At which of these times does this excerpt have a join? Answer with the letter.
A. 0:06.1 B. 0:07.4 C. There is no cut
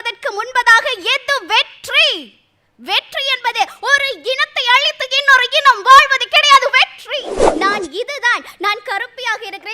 B